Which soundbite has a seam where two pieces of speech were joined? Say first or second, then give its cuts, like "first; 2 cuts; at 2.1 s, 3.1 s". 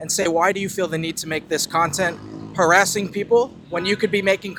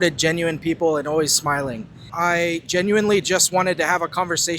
second; 1 cut; at 2.1 s